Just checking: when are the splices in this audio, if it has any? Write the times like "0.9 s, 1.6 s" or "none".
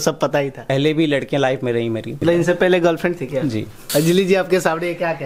0.7 s, 2.1 s, 3.7 s